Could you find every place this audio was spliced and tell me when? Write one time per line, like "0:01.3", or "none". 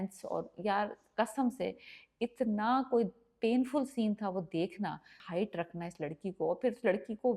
0:05.2